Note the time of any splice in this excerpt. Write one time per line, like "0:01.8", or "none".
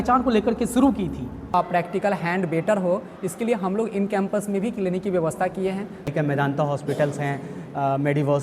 0:01.5
0:06.1